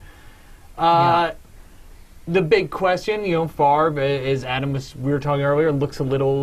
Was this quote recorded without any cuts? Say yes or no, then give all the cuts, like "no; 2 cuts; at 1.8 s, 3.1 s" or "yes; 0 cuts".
yes; 0 cuts